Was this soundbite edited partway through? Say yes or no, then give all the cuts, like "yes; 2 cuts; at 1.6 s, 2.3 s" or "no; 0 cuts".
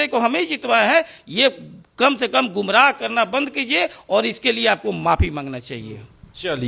no; 0 cuts